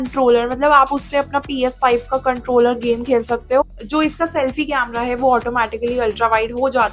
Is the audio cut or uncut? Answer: cut